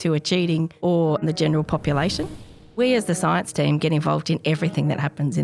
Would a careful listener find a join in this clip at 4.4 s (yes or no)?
no